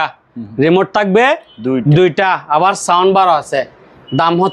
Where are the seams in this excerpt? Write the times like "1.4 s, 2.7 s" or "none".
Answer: none